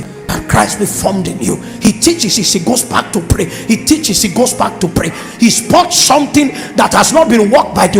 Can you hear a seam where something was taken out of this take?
no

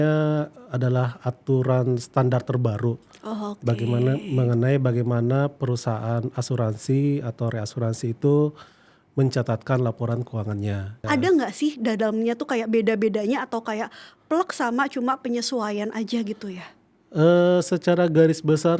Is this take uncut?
no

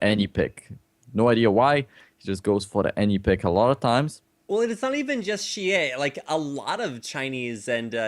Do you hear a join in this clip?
yes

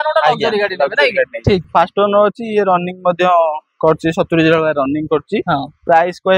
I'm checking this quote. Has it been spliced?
yes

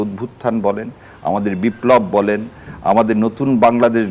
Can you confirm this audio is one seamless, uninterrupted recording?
yes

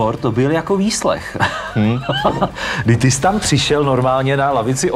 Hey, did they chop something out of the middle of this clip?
no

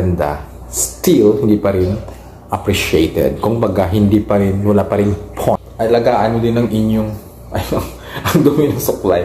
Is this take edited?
yes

